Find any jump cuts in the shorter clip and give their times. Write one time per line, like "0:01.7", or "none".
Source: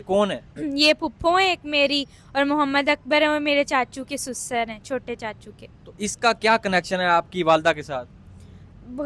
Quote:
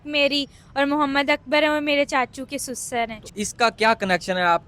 0:03.2